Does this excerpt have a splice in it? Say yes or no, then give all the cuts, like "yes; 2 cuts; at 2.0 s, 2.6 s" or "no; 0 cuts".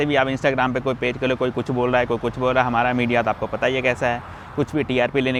no; 0 cuts